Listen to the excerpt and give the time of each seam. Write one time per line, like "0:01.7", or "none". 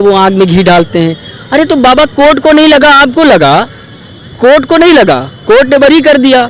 none